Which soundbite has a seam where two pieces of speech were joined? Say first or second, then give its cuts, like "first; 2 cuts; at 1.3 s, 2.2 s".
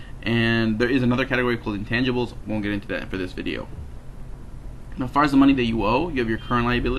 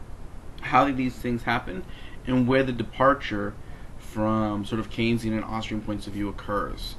first; 1 cut; at 1.6 s